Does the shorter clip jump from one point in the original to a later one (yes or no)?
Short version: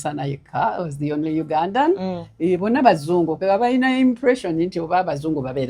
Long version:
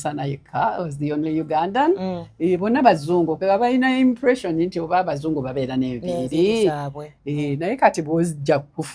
no